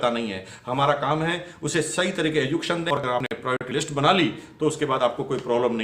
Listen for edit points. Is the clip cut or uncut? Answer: cut